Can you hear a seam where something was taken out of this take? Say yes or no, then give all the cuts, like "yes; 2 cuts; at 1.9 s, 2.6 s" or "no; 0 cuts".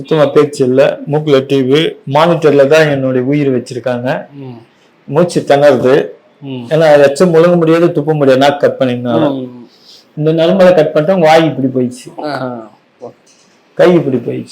no; 0 cuts